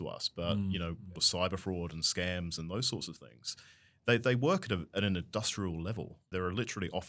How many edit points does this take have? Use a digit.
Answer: 2